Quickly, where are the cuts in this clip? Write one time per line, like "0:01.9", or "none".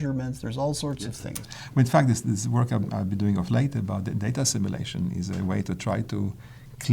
0:01.3